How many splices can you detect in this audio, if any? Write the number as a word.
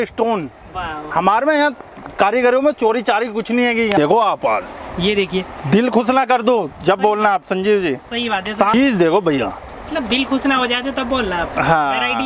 two